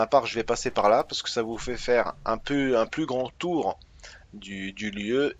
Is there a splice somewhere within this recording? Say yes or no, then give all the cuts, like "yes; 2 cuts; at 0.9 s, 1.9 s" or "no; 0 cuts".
no; 0 cuts